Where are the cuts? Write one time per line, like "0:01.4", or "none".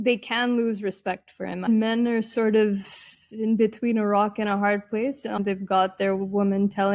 0:01.7
0:05.4